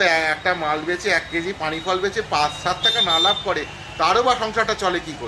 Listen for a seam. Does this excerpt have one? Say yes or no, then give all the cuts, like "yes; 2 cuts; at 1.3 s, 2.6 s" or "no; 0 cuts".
no; 0 cuts